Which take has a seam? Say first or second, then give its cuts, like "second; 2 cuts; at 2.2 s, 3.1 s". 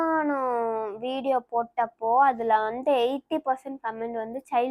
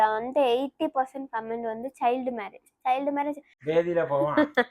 second; 1 cut; at 3.5 s